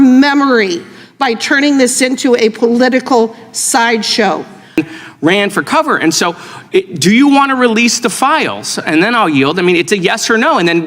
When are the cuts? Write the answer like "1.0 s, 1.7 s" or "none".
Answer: 4.8 s